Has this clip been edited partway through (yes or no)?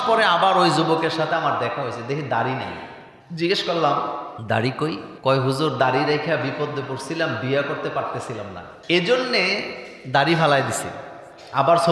no